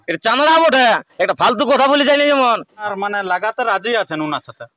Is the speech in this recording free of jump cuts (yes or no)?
no